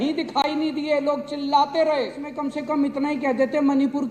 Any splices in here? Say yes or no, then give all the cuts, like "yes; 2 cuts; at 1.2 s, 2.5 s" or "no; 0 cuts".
yes; 1 cut; at 2.3 s